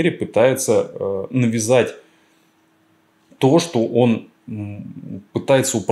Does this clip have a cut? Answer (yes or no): no